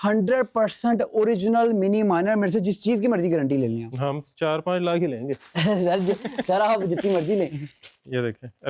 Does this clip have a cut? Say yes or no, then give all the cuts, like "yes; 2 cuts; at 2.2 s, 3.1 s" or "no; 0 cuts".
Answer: no; 0 cuts